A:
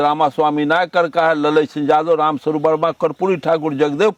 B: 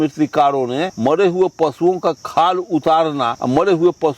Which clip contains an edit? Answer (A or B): B